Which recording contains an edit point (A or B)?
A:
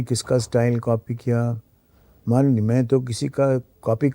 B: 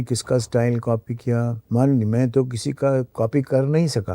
B